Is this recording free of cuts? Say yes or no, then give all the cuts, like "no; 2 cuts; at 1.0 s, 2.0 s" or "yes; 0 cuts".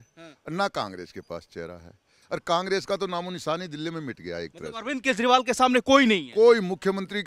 no; 1 cut; at 2.1 s